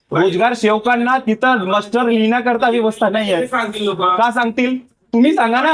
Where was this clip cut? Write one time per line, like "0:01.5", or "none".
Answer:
none